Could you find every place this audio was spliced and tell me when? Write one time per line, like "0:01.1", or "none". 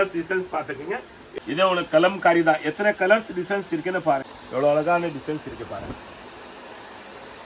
0:01.2
0:04.3

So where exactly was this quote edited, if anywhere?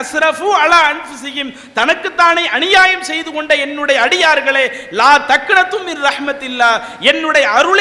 none

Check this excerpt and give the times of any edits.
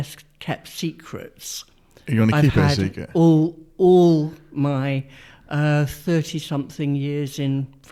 none

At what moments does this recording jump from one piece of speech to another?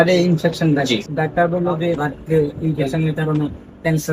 0:01.1
0:02.0

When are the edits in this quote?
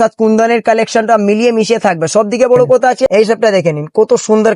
0:03.1

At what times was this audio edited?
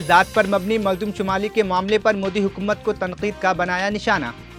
none

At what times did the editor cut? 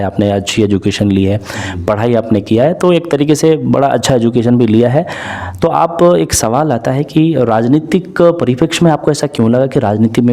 none

